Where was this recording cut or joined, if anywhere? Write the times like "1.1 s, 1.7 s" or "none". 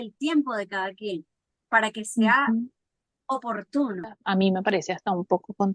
4.2 s